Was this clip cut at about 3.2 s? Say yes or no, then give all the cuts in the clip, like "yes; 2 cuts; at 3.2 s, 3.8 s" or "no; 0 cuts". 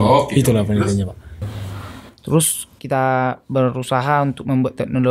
no; 1 cut; at 1.4 s